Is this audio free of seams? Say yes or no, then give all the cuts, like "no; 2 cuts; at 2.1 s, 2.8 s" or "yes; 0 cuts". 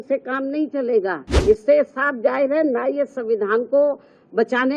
no; 1 cut; at 1.4 s